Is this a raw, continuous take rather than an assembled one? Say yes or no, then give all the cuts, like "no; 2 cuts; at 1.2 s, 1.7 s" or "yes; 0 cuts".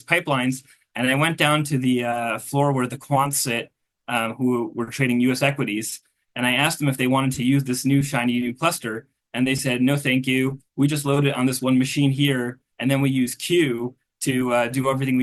yes; 0 cuts